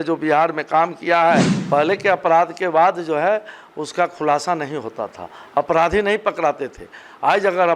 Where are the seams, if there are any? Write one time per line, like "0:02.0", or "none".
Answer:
0:01.5